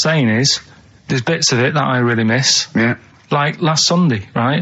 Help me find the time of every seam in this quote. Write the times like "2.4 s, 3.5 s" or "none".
none

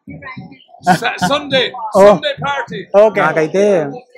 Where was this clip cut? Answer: 3.2 s

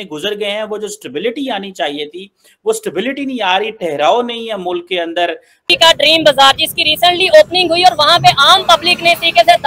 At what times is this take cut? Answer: 5.7 s

